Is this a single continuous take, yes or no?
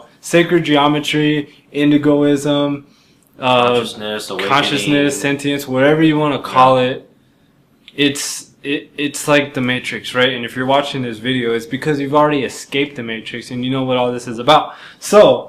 no